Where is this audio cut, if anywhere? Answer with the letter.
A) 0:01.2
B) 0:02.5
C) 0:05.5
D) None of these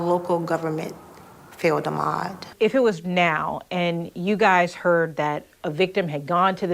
B